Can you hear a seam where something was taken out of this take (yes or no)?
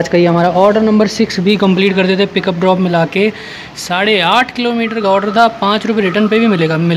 no